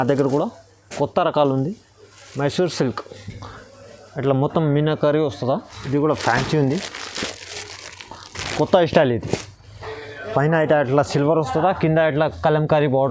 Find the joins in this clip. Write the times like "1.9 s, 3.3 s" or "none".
5.7 s